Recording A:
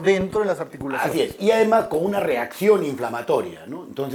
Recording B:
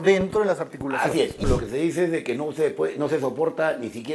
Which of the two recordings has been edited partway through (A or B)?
B